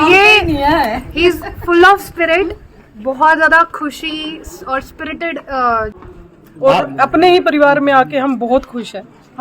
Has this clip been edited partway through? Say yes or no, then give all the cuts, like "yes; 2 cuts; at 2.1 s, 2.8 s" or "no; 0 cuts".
yes; 1 cut; at 6.0 s